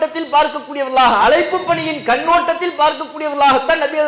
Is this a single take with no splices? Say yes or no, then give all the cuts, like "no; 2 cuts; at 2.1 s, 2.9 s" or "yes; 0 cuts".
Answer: yes; 0 cuts